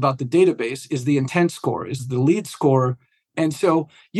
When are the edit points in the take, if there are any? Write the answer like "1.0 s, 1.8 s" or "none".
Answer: 2.0 s, 3.2 s